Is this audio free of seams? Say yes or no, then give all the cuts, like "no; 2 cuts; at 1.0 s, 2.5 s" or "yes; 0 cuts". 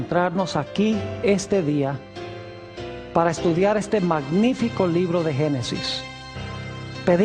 no; 1 cut; at 1.3 s